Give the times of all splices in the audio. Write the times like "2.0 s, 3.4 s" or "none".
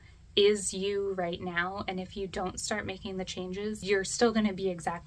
3.8 s

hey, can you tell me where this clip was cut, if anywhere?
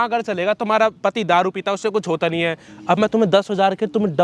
none

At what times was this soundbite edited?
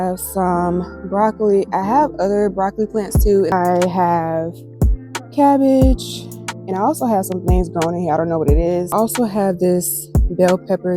3.5 s, 8.9 s

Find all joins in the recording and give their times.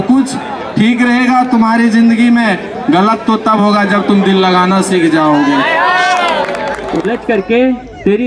6.8 s

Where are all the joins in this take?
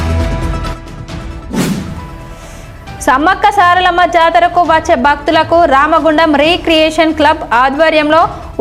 none

